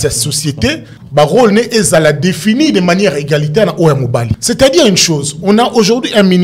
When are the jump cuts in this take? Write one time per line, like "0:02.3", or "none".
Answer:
0:00.9
0:04.3